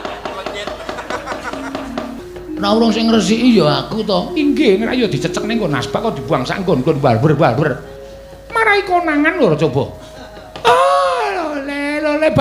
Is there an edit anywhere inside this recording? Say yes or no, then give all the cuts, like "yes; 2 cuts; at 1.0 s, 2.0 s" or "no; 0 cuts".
yes; 1 cut; at 2.1 s